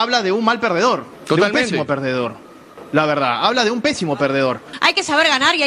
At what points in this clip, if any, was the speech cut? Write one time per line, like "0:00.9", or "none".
0:01.1
0:04.7